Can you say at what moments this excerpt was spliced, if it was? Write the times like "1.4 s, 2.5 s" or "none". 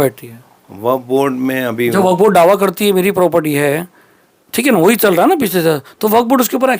none